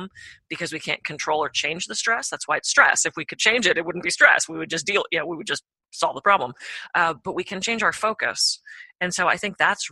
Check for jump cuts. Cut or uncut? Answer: cut